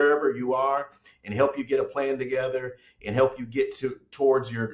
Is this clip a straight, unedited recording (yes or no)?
yes